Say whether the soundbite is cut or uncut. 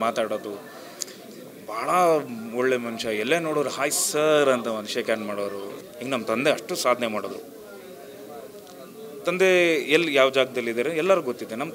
cut